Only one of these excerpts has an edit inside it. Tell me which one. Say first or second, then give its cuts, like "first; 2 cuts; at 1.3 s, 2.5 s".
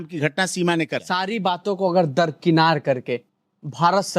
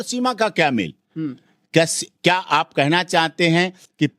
first; 1 cut; at 1.0 s